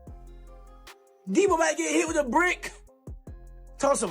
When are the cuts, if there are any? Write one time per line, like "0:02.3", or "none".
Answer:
0:01.2